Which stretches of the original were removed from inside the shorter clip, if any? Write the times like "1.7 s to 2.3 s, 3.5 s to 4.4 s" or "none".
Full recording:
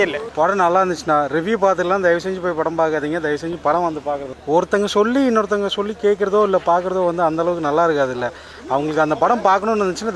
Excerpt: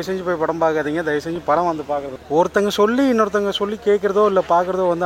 none